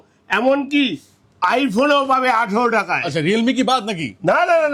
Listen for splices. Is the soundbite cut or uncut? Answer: uncut